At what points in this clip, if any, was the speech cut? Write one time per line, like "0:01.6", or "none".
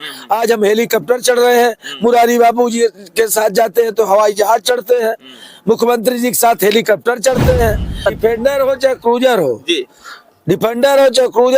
0:07.9